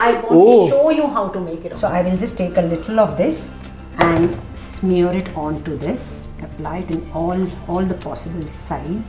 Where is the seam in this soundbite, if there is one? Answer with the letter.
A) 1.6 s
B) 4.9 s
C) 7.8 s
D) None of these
A